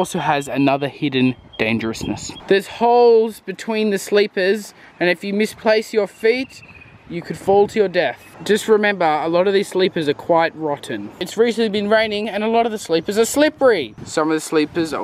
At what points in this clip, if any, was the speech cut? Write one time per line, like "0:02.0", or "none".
0:02.3
0:08.3